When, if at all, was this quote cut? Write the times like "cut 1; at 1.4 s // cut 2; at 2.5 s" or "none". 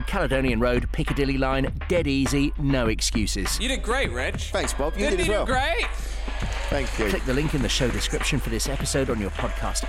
none